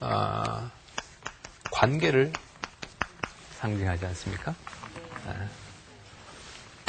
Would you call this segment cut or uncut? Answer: uncut